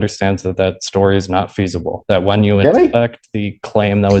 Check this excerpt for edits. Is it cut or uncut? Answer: uncut